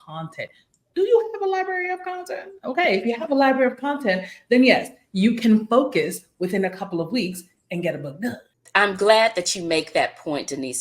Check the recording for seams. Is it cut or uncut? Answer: cut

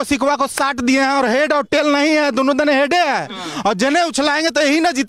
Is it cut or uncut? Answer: uncut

